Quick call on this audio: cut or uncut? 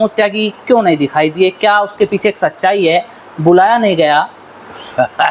uncut